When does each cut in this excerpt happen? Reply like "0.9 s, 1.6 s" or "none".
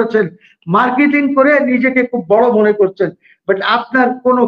none